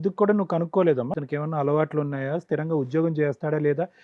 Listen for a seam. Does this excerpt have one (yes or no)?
yes